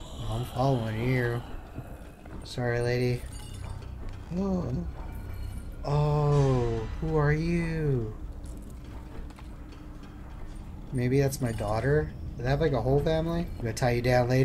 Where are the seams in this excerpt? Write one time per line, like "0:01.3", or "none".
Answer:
0:13.5